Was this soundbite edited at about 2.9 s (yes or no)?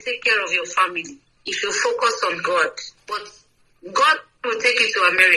yes